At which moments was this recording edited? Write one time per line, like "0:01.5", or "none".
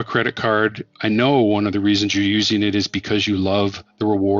0:00.9